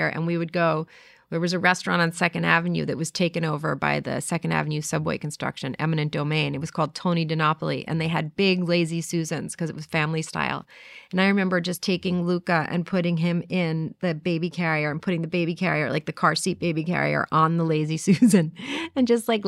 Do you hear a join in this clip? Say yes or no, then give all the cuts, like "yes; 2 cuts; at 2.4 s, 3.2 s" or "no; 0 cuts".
no; 0 cuts